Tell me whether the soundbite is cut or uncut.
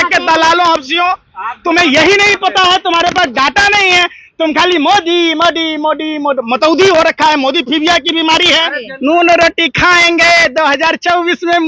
cut